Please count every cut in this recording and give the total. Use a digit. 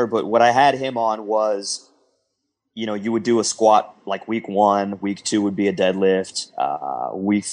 0